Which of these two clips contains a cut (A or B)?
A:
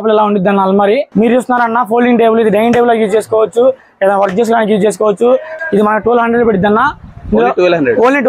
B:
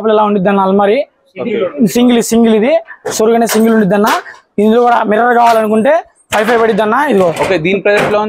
A